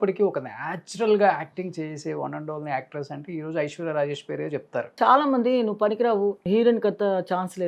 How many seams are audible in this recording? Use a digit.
2